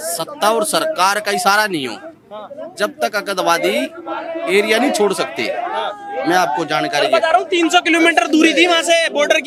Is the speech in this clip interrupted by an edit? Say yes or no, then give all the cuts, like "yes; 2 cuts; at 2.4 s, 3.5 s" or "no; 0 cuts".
no; 0 cuts